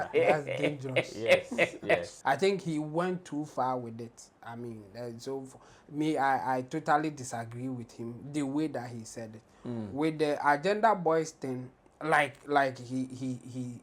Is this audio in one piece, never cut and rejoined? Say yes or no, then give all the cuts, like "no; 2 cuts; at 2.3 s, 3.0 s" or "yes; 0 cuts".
no; 1 cut; at 2.1 s